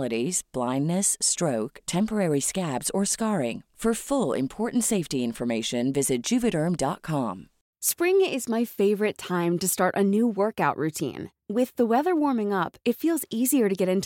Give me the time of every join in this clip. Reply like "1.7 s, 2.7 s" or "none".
7.7 s